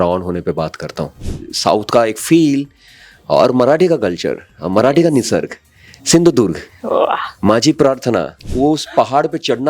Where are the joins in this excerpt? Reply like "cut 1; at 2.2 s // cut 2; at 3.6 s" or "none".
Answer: cut 1; at 1.2 s // cut 2; at 8.4 s